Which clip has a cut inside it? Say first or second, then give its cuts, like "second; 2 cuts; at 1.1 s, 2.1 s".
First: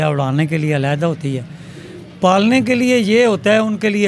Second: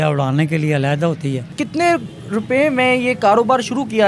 second; 1 cut; at 1.6 s